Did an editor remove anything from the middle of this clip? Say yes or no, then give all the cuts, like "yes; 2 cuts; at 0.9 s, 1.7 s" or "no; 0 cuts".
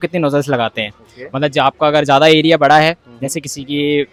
no; 0 cuts